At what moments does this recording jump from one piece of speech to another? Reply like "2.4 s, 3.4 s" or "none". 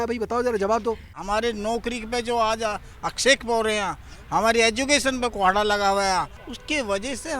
1.2 s, 6.5 s